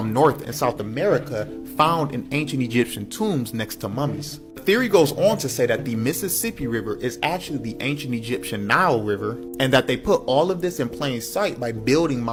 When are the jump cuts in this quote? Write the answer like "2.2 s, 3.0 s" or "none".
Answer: none